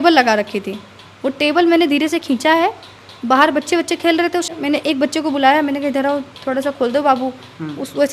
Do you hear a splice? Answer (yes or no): yes